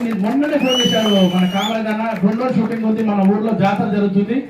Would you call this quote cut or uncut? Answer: uncut